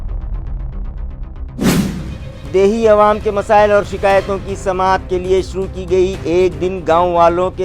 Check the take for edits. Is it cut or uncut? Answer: cut